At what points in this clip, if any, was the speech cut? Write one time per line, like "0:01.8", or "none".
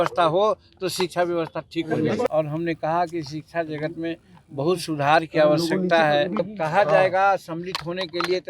0:02.3
0:06.5